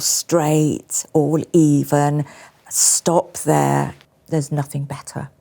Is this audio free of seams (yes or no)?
no